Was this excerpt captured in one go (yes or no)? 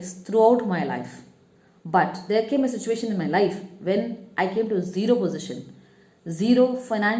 yes